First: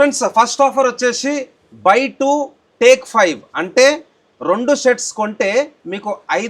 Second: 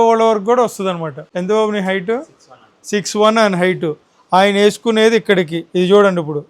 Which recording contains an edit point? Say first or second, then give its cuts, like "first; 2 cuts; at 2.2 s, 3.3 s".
second; 1 cut; at 1.2 s